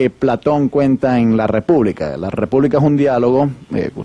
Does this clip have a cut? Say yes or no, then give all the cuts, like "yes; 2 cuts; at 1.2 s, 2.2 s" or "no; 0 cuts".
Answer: no; 0 cuts